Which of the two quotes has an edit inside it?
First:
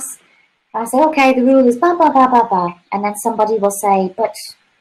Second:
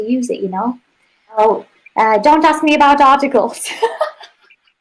second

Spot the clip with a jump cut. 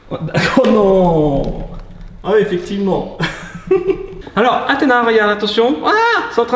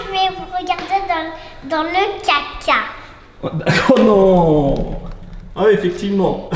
first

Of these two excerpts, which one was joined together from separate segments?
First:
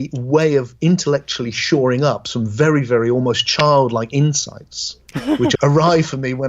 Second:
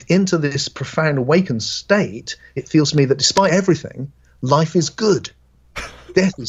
first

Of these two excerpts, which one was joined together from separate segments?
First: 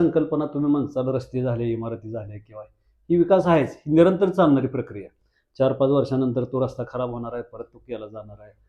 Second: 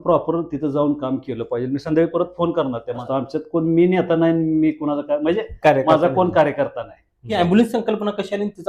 second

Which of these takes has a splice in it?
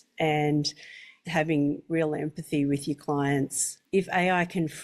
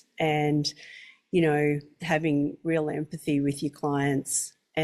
first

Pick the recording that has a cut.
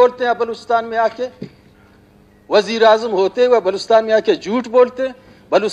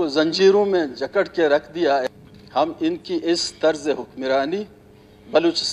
second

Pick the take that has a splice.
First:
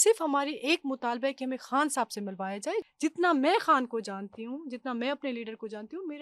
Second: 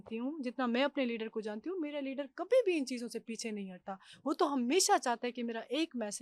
first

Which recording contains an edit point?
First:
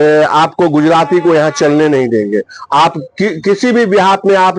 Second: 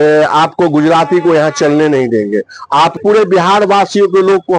second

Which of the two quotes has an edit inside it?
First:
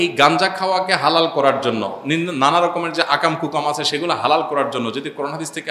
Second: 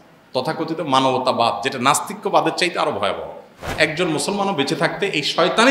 second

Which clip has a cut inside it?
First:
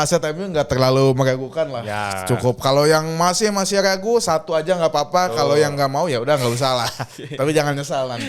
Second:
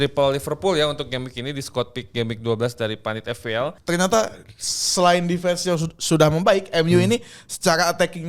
second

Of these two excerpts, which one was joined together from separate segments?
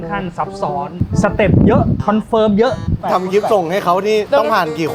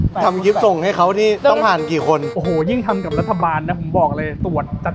first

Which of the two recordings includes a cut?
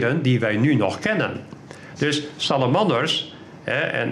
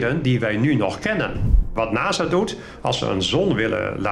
second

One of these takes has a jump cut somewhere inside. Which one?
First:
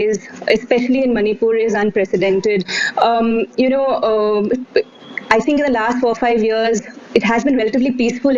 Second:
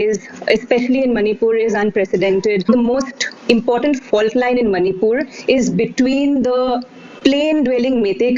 second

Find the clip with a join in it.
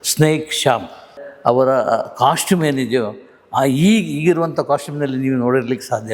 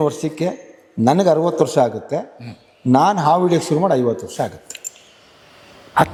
first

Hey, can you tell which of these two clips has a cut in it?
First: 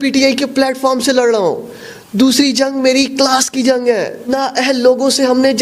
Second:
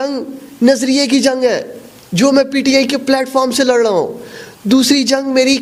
first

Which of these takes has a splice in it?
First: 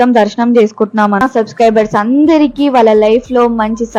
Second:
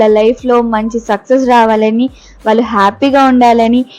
first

